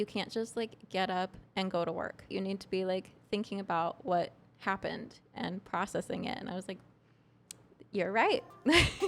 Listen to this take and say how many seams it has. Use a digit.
1